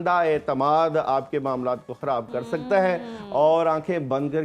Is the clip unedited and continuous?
yes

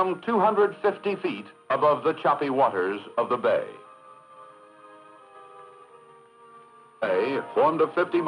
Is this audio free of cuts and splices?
yes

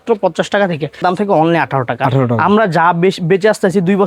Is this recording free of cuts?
no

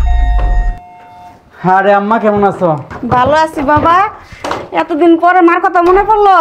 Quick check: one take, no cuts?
yes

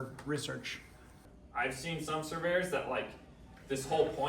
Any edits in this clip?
yes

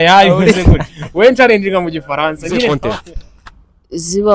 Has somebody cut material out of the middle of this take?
yes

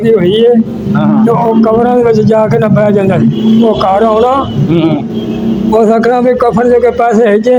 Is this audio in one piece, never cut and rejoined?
yes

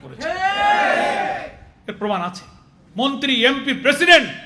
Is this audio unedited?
yes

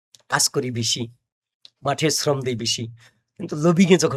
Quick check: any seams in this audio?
no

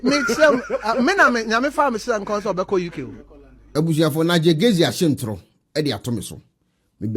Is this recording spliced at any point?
no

